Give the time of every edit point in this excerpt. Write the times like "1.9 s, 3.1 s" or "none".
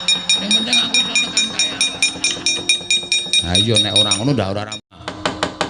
4.7 s